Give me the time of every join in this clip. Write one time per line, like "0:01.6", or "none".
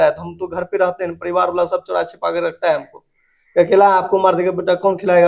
none